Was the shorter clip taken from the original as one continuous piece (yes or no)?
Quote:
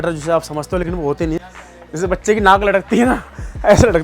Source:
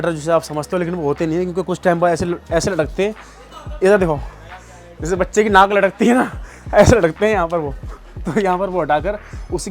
no